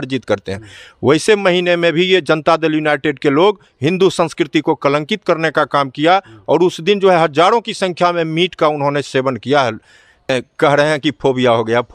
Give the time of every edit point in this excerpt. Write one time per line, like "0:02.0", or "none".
0:10.3